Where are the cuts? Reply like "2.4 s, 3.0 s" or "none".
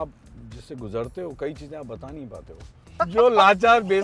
3.0 s

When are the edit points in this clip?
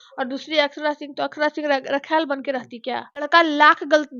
3.3 s

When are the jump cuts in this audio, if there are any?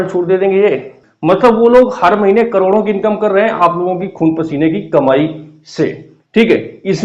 1.0 s

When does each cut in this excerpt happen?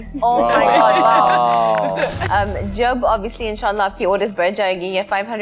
2.2 s

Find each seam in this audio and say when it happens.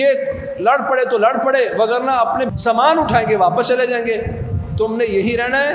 2.5 s

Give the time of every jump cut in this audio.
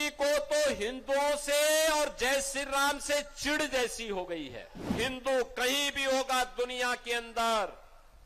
4.9 s

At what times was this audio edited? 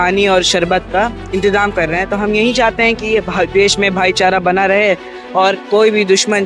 1.3 s

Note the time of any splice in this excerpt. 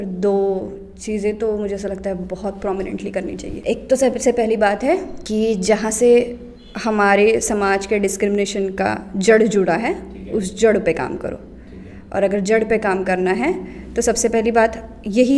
3.5 s, 5.2 s

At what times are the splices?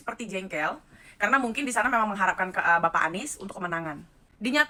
none

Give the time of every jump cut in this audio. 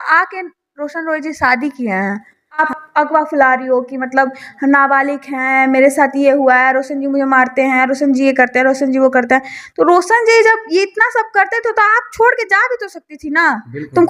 2.6 s

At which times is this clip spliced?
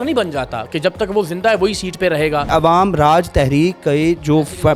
2.5 s

